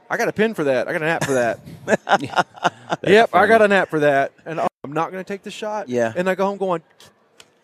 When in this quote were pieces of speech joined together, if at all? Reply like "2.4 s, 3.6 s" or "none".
4.6 s